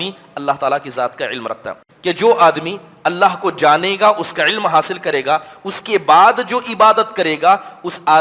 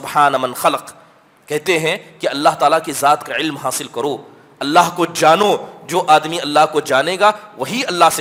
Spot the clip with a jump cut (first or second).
first